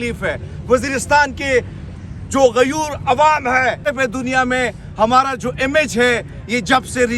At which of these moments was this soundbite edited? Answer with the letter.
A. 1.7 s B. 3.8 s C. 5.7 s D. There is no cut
B